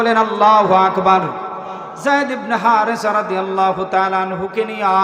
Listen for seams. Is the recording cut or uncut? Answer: cut